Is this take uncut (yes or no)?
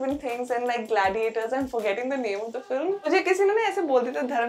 no